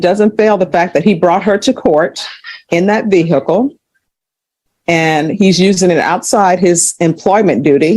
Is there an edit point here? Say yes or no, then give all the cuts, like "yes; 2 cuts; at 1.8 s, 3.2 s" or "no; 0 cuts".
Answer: no; 0 cuts